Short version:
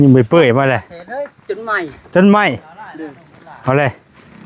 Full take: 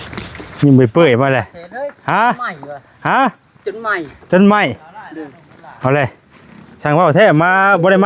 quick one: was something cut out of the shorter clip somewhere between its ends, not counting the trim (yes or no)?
yes